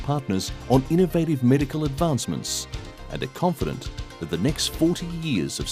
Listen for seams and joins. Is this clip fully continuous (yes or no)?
yes